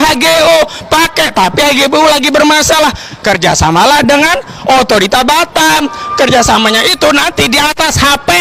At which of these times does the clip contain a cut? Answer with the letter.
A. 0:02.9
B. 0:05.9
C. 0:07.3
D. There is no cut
D